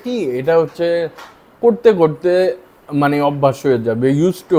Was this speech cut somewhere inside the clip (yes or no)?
no